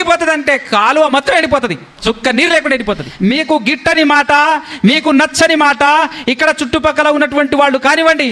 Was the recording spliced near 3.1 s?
yes; 2 cuts; at 1.9 s, 3.1 s

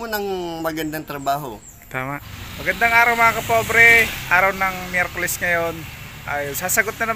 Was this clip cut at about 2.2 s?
yes; 1 cut; at 2.2 s

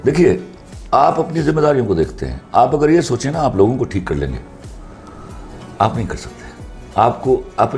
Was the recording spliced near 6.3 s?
no; 0 cuts

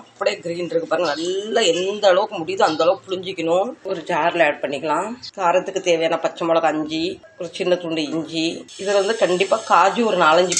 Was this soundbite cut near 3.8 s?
no; 0 cuts

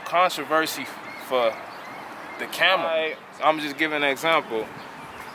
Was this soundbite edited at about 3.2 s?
yes; 1 cut; at 3.2 s

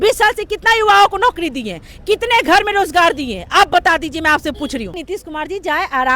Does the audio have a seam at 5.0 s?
yes; 1 cut; at 5.0 s

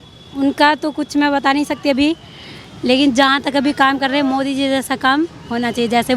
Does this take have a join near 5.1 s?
no; 0 cuts

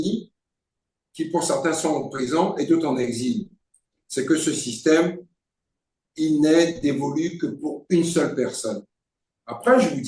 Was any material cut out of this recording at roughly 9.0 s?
no; 0 cuts

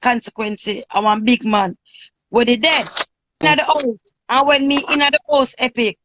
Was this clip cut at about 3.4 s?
yes; 1 cut; at 3.4 s

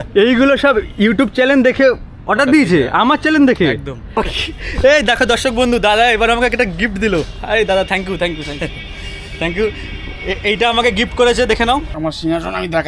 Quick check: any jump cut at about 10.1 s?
no; 2 cuts; at 4.2 s, 11.9 s

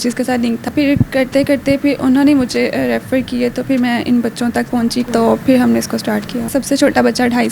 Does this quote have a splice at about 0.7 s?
yes; 3 cuts; at 0.7 s, 5.1 s, 6.5 s

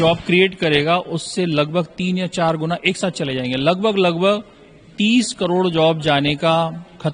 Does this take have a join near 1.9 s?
no; 0 cuts

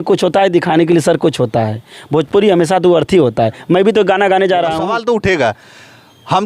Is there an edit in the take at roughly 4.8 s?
yes; 1 cut; at 4.8 s

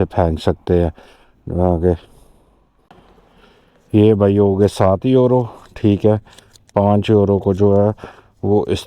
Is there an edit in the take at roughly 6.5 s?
no; 1 cut; at 2.9 s

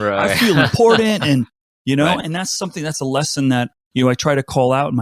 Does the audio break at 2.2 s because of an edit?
yes; 2 cuts; at 2.2 s, 3.8 s

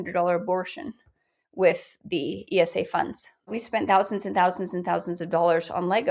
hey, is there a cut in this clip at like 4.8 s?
no; 1 cut; at 3.6 s

